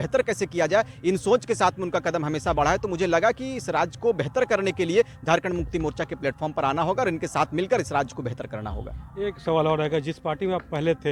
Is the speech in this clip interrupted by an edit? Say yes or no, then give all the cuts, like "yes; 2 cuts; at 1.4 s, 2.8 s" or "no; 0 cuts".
no; 0 cuts